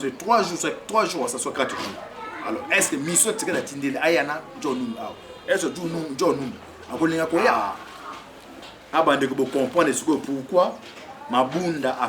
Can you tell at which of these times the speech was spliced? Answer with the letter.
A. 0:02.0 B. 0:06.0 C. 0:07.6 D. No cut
C